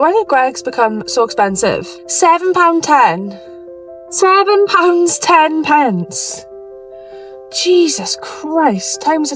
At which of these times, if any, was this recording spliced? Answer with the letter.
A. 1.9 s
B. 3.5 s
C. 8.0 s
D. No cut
A